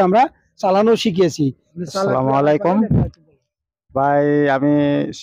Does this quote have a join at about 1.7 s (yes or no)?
yes